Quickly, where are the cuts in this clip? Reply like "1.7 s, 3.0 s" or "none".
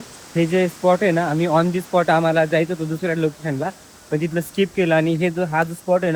none